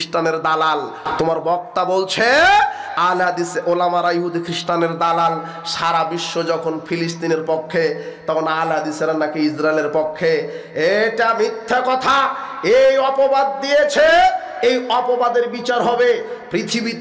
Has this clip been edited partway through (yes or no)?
no